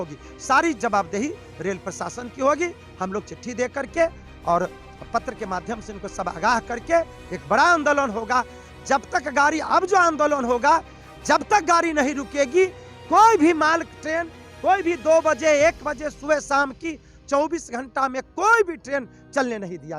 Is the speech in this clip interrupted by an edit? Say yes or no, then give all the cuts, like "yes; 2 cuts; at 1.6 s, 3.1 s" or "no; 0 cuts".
no; 0 cuts